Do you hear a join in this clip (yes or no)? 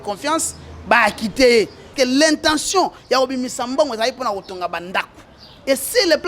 yes